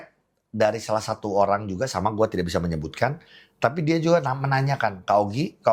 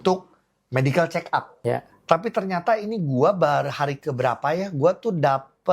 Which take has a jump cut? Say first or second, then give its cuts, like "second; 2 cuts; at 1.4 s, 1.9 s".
second; 1 cut; at 1.5 s